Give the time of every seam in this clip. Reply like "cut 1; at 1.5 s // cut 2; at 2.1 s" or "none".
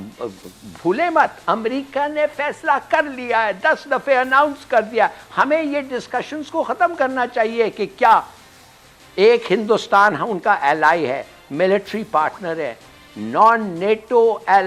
none

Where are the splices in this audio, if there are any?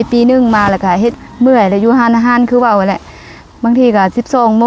cut 1; at 1.1 s

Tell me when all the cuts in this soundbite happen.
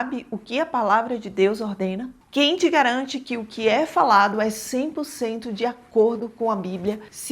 cut 1; at 2.2 s

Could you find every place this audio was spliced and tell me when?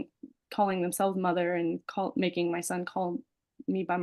none

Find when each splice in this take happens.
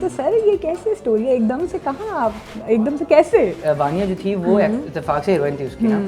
cut 1; at 3.6 s

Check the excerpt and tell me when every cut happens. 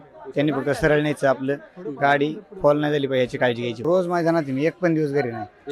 cut 1; at 3.8 s

